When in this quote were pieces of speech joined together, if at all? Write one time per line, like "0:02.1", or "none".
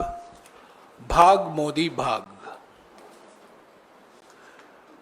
none

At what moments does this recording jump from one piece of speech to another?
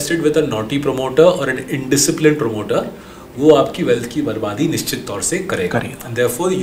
none

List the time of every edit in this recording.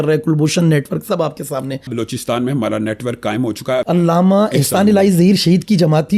0:02.0
0:03.8

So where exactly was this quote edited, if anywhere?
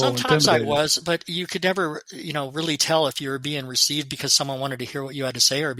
none

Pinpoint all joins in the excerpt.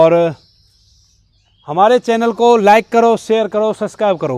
none

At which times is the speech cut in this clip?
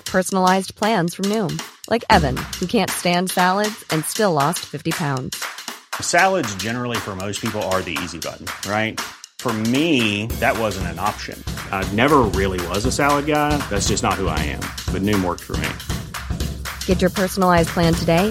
none

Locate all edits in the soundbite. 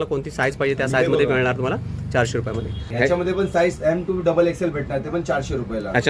0:02.9

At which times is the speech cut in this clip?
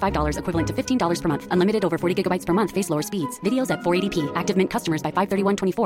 none

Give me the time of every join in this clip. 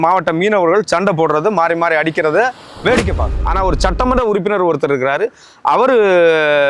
0:03.3

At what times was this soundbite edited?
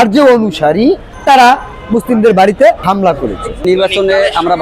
0:01.1
0:03.0

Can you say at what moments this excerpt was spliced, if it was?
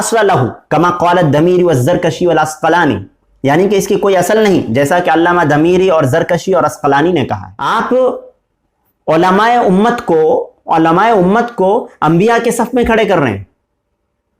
0:07.5

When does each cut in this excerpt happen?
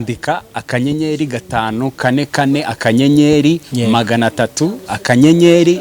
none

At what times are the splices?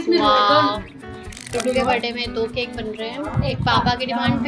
0:01.5
0:03.3

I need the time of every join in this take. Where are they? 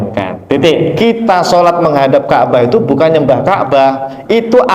0:00.9

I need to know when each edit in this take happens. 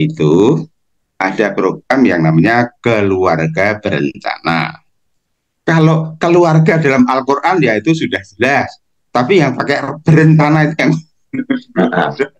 none

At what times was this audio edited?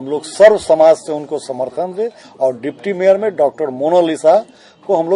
0:02.2

